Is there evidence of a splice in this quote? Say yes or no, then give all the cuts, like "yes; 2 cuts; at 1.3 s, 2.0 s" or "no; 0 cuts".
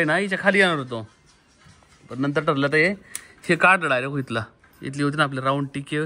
no; 0 cuts